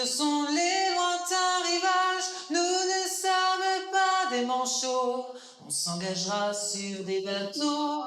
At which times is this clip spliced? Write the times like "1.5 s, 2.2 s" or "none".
none